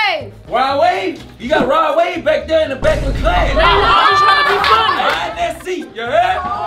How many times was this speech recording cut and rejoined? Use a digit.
0